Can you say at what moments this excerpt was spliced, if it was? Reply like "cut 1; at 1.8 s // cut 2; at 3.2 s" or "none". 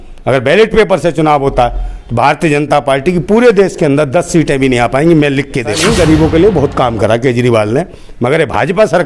cut 1; at 5.7 s